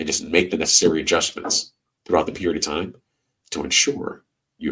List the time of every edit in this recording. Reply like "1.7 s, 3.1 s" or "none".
none